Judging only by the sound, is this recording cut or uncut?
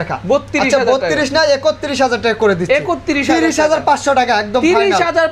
uncut